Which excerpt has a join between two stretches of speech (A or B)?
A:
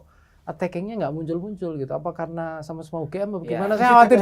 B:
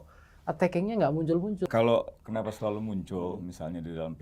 B